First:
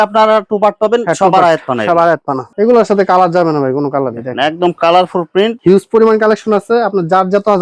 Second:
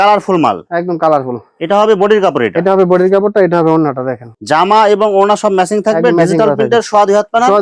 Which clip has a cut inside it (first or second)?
first